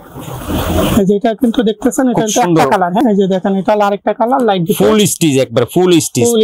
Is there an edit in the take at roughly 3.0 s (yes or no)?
yes